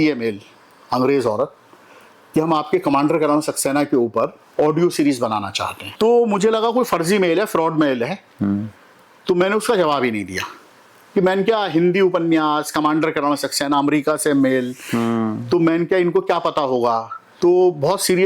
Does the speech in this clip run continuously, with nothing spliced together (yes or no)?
no